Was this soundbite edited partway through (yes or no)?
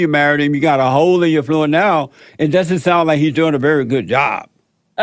no